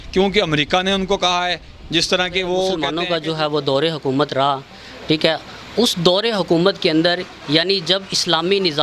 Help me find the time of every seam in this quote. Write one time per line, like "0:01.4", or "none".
0:02.9